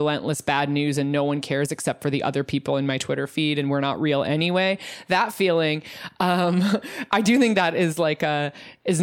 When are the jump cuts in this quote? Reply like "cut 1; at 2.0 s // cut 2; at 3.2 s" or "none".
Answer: none